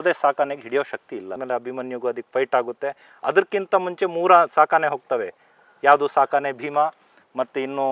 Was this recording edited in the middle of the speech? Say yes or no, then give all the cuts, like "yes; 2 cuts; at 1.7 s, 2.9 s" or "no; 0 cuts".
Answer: yes; 1 cut; at 1.4 s